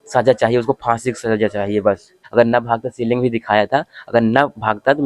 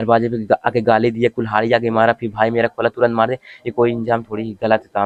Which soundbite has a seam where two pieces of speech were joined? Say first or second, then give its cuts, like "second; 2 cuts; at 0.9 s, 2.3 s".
first; 1 cut; at 2.2 s